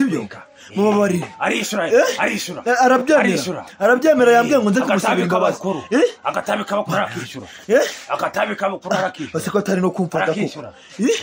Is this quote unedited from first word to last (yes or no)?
yes